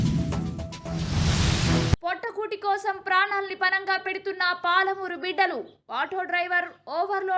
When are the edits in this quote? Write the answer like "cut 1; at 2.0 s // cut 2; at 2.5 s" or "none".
cut 1; at 2.0 s